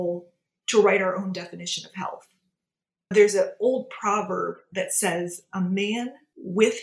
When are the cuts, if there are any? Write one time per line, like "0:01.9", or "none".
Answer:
none